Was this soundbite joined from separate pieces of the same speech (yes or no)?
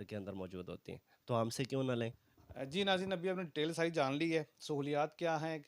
no